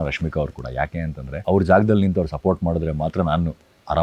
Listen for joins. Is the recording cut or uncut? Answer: cut